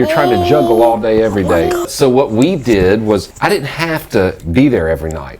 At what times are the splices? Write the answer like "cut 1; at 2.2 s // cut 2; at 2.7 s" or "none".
cut 1; at 1.9 s // cut 2; at 3.3 s